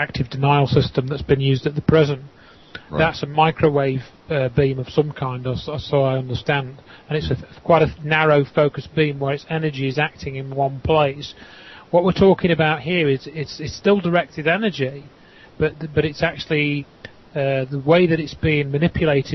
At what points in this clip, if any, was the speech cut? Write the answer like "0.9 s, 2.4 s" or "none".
3.8 s